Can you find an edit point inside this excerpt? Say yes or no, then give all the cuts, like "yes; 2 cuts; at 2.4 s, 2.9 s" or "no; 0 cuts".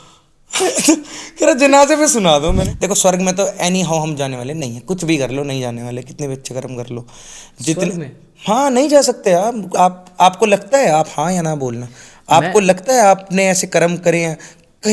yes; 1 cut; at 2.6 s